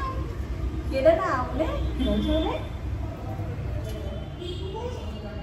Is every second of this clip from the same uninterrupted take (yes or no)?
yes